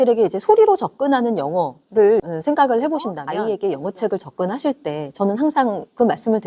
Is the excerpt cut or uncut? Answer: cut